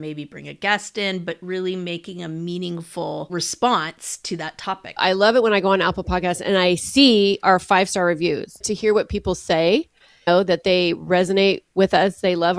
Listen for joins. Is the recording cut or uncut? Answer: cut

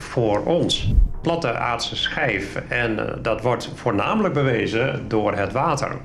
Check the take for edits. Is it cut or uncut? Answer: cut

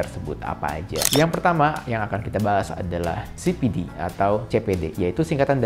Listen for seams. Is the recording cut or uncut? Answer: cut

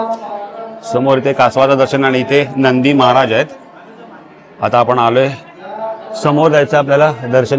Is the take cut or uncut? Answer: uncut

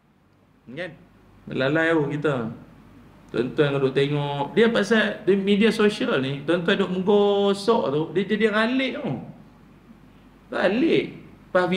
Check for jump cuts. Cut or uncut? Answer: cut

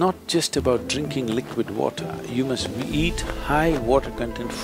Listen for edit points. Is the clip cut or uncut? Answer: uncut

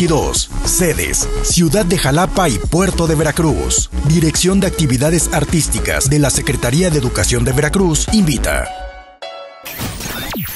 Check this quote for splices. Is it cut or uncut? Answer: cut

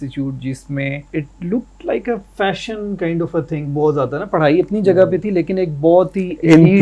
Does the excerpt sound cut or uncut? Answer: cut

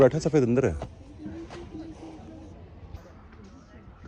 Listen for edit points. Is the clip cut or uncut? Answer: uncut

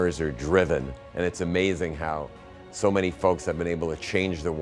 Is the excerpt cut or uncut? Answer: cut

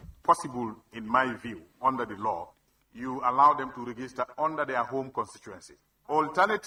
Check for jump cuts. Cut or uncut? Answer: uncut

